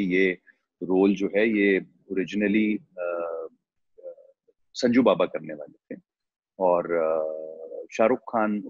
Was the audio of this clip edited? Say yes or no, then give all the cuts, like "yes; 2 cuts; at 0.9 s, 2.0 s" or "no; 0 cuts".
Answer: no; 0 cuts